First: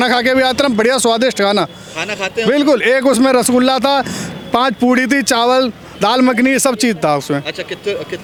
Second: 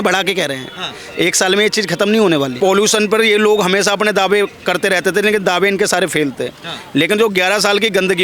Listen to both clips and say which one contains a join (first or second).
second